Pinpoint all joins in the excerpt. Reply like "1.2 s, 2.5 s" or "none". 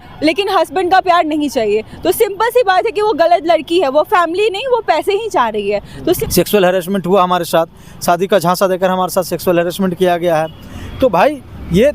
6.2 s